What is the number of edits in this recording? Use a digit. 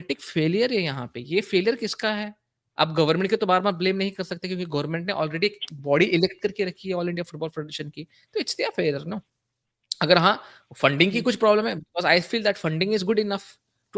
0